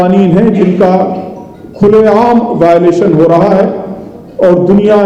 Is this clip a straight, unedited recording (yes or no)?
yes